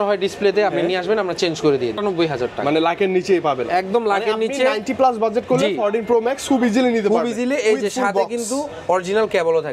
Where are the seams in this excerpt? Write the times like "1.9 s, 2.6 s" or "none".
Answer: 2.0 s